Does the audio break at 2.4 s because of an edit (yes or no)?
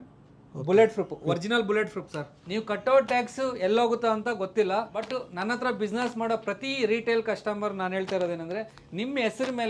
yes